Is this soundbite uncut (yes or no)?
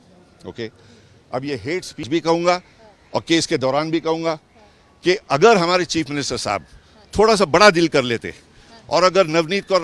no